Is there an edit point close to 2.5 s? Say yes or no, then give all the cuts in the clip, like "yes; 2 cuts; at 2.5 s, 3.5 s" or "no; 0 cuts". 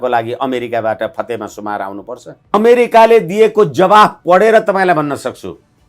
yes; 1 cut; at 2.5 s